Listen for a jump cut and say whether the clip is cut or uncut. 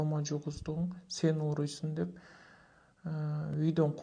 uncut